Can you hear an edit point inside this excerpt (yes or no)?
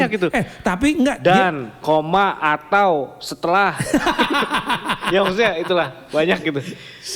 no